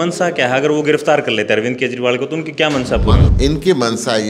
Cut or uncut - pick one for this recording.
cut